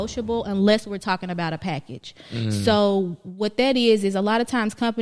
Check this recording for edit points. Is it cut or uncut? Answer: uncut